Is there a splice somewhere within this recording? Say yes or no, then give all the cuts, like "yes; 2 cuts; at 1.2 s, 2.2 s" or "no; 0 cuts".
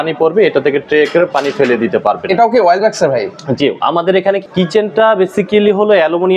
no; 0 cuts